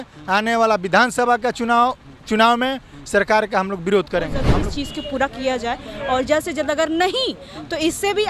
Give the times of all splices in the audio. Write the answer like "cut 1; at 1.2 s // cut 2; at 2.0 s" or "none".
cut 1; at 4.4 s